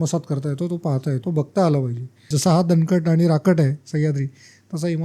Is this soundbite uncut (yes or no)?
no